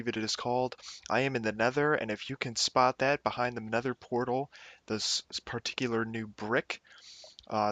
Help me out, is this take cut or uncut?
uncut